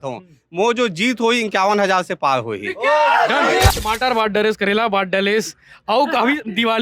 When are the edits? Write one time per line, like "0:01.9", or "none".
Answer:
0:03.7